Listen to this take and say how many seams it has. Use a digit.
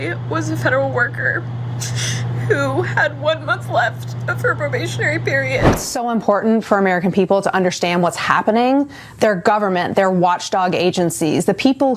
1